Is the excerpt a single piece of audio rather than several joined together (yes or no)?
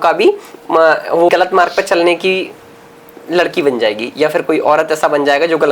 no